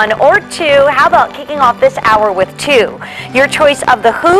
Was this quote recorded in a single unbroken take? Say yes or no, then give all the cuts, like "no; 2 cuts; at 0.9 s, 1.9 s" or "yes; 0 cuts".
yes; 0 cuts